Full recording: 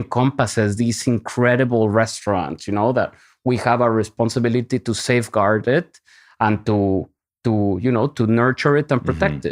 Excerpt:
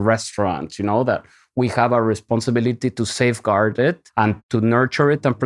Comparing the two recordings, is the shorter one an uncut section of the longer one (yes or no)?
no